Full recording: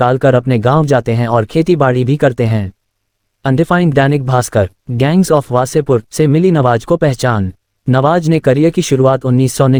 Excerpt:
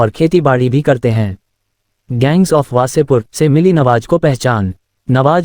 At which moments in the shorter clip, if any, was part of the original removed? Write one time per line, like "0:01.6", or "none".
0:02.0